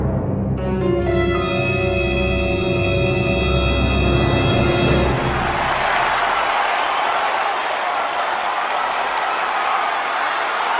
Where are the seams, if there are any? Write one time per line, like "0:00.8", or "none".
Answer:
0:05.3